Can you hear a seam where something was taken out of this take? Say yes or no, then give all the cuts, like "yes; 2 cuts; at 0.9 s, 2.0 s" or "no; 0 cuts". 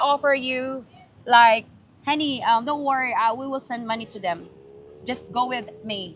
no; 0 cuts